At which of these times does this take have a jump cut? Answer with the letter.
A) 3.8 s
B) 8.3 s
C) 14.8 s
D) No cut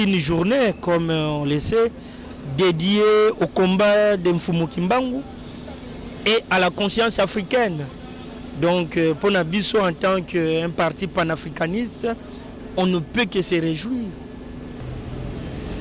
C